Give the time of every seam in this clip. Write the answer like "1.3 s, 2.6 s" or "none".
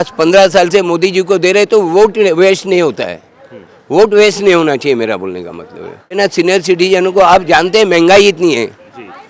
6.0 s